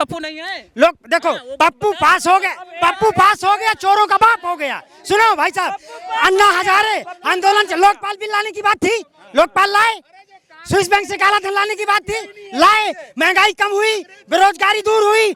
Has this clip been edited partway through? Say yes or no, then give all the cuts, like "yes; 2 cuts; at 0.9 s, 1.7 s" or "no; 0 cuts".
no; 0 cuts